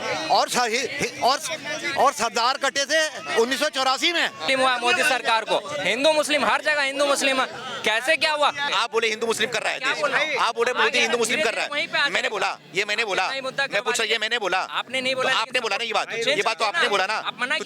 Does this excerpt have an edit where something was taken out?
yes; 2 cuts; at 4.4 s, 8.7 s

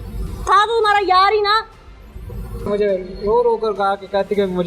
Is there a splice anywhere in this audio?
yes; 1 cut; at 2.7 s

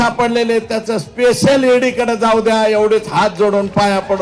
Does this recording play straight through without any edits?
yes; 0 cuts

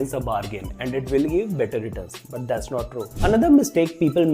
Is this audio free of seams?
no; 1 cut; at 3.1 s

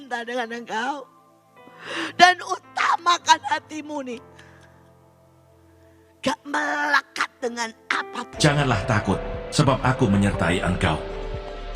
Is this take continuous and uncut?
no; 1 cut; at 8.2 s

